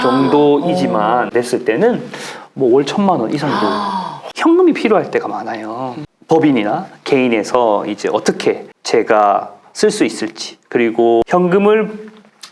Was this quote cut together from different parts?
yes; 3 cuts; at 1.3 s, 4.2 s, 11.3 s

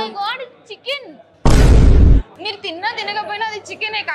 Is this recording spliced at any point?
yes; 1 cut; at 2.3 s

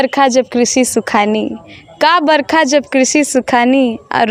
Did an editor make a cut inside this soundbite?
no; 0 cuts

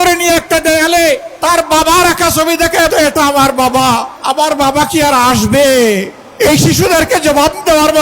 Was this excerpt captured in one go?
no; 4 cuts; at 1.3 s, 2.9 s, 4.2 s, 6.2 s

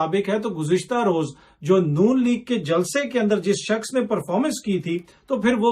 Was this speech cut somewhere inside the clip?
no; 0 cuts

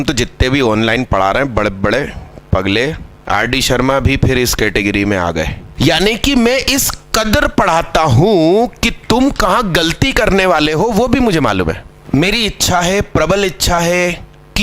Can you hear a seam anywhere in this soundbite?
yes; 3 cuts; at 3.2 s, 5.6 s, 11.9 s

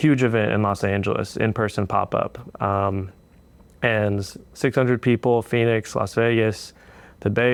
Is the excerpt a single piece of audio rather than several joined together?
yes; 0 cuts

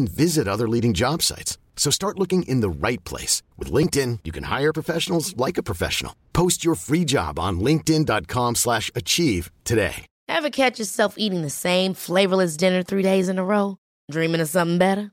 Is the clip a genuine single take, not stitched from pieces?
no; 1 cut; at 10.1 s

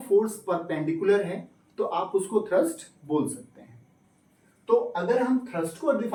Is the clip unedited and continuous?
yes; 0 cuts

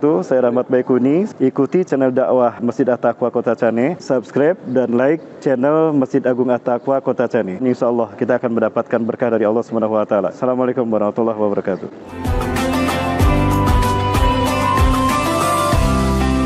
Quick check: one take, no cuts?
yes; 0 cuts

